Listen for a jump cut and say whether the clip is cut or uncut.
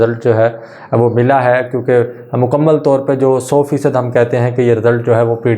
uncut